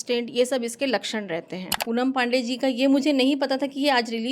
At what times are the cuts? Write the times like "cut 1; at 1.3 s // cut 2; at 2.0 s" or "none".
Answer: cut 1; at 1.7 s

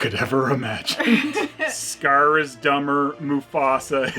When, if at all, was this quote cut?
cut 1; at 1.5 s

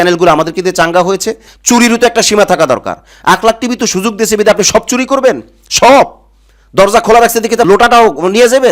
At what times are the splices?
cut 1; at 1.4 s // cut 2; at 7.7 s

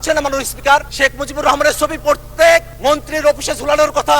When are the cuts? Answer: cut 1; at 0.9 s // cut 2; at 2.7 s

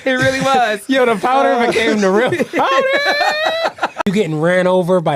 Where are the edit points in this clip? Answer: cut 1; at 4.0 s

